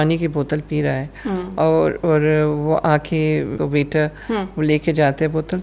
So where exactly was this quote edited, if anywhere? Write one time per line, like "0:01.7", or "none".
0:03.5